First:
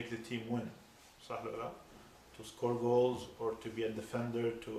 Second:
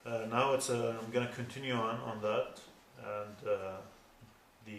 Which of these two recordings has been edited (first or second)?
second